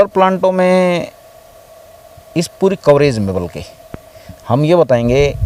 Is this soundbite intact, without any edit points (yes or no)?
yes